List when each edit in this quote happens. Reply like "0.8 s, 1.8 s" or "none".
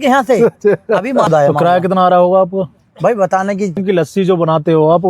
1.3 s, 3.8 s